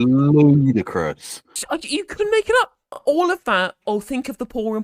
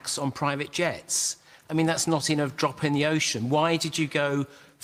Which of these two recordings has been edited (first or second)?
first